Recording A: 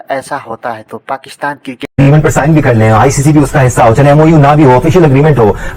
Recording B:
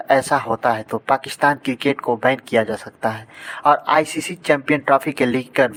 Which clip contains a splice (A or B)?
A